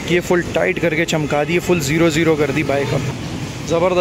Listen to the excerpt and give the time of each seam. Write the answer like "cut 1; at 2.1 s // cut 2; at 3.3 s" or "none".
cut 1; at 3.1 s

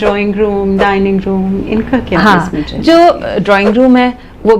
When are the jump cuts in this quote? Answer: none

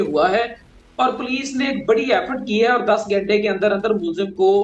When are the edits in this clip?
none

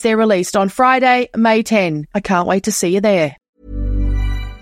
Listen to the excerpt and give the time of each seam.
cut 1; at 3.5 s

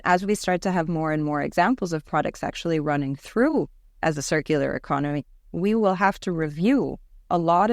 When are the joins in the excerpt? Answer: none

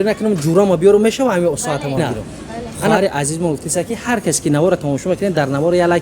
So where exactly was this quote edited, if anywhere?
cut 1; at 3.0 s

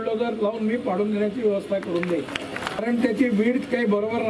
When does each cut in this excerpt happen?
cut 1; at 2.8 s

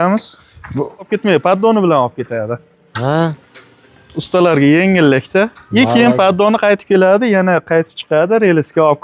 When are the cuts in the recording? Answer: cut 1; at 1.1 s

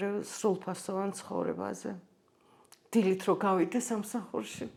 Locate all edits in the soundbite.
none

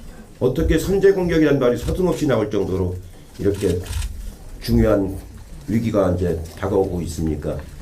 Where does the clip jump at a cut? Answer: none

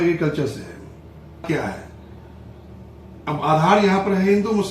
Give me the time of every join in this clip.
cut 1; at 1.5 s

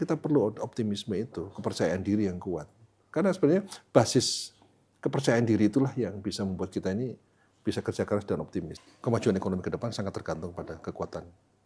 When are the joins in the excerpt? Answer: cut 1; at 8.8 s

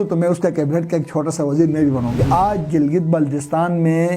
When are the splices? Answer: cut 1; at 2.2 s

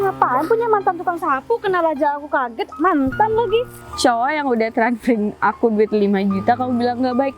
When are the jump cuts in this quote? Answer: cut 1; at 3.8 s

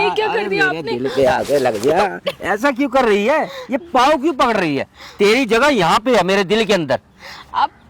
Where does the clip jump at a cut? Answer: none

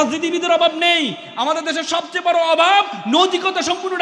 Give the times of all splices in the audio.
none

